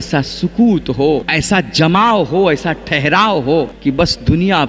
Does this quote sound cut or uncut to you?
cut